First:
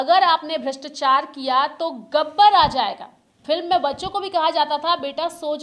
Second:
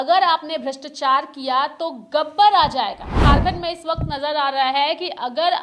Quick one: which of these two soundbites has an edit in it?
second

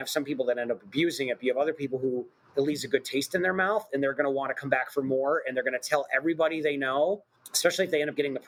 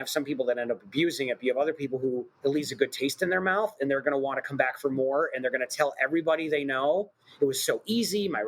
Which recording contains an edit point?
second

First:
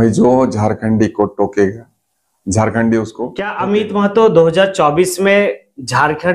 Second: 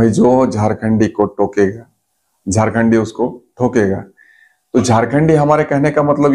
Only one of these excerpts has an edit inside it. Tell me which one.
first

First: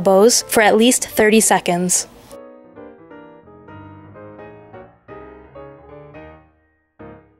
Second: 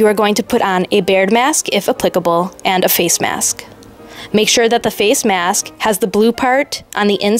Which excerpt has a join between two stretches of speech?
first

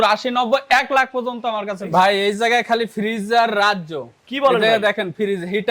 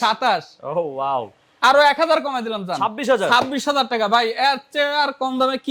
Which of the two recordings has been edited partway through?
first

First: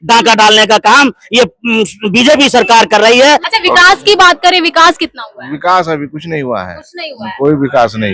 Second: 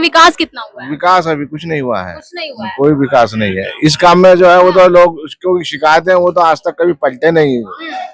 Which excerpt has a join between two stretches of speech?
first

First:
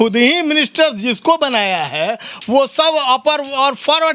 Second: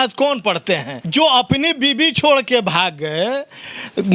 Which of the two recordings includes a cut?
second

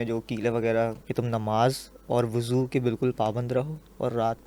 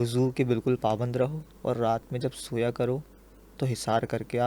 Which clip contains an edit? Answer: first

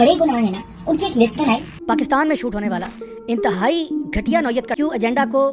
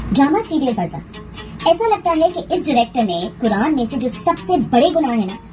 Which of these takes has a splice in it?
first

